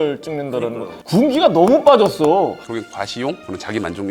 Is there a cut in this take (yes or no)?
yes